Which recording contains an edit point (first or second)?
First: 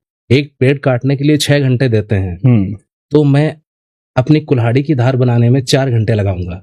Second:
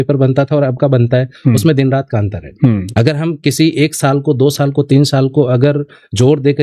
second